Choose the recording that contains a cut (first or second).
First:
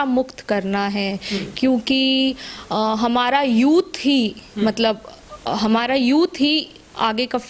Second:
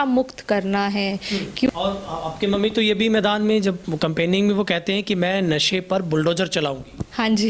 second